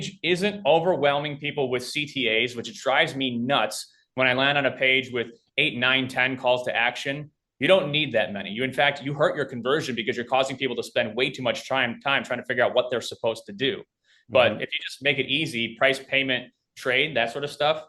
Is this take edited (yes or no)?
no